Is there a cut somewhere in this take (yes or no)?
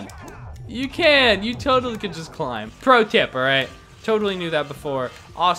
yes